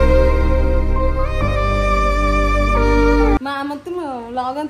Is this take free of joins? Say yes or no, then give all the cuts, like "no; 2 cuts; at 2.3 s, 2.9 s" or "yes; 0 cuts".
no; 1 cut; at 3.4 s